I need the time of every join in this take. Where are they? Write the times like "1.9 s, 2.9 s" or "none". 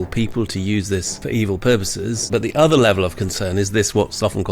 1.1 s, 2.2 s

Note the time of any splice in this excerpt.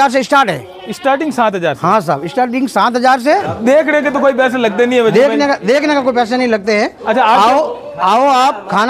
3.3 s

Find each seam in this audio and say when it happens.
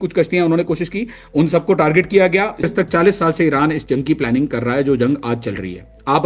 2.7 s

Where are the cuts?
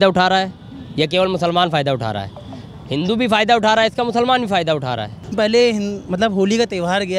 5.3 s

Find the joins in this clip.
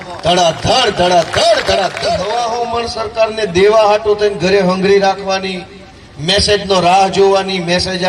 2.2 s

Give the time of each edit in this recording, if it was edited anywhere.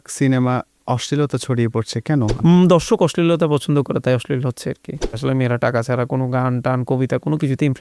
2.4 s, 5.2 s

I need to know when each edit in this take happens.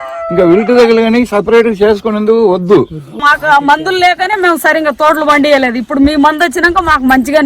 3.2 s

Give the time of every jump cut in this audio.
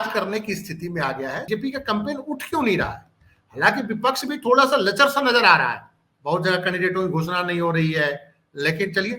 1.5 s

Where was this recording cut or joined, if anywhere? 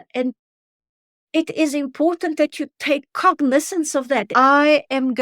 4.3 s

